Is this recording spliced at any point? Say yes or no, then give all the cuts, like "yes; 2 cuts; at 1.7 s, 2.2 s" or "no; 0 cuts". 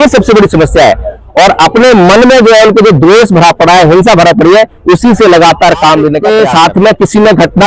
yes; 1 cut; at 6.2 s